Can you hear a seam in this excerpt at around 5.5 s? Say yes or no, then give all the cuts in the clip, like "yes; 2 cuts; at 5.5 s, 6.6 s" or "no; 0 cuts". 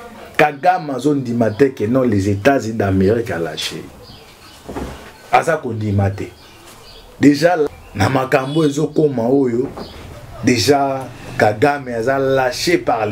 no; 1 cut; at 7.7 s